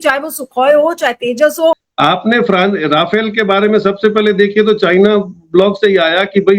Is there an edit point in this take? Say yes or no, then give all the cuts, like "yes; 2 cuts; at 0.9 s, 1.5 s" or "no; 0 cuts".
yes; 1 cut; at 1.9 s